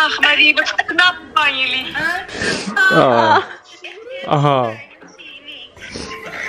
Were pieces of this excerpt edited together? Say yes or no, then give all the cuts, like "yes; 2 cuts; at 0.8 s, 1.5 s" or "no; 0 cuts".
no; 0 cuts